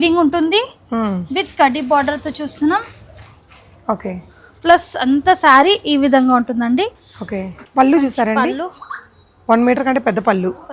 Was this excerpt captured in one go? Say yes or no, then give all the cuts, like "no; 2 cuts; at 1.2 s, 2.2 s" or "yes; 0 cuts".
no; 1 cut; at 7.6 s